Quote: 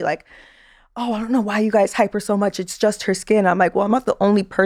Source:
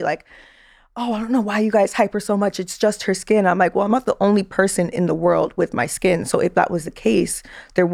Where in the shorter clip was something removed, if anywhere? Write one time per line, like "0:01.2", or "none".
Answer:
none